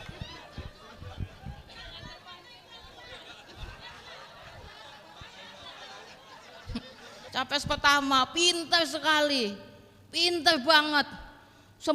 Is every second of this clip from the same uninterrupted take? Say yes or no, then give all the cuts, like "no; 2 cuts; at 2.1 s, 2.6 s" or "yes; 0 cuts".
no; 1 cut; at 7.2 s